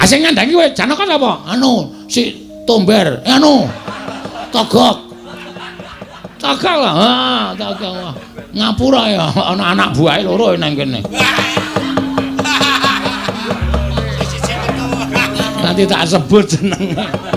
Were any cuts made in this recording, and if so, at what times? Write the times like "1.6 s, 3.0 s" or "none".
6.4 s